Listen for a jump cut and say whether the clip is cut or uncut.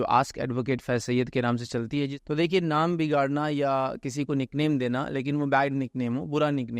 cut